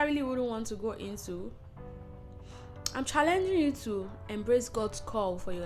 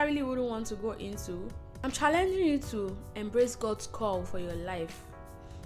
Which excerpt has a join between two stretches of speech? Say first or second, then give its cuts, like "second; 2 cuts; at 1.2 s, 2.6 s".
second; 1 cut; at 1.6 s